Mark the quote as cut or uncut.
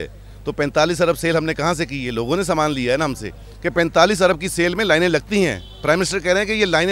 cut